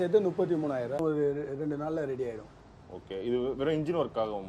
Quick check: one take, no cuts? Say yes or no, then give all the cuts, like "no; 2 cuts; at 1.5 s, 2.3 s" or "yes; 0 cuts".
no; 1 cut; at 1.0 s